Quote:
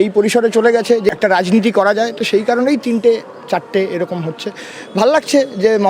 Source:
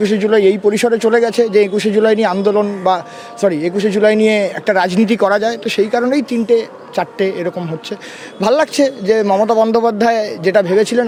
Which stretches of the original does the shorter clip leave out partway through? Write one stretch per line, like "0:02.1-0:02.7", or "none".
0:01.6-0:04.5